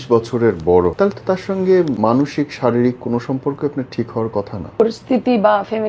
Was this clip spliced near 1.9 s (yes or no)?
yes